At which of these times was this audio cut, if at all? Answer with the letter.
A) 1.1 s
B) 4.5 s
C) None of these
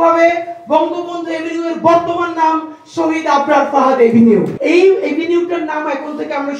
B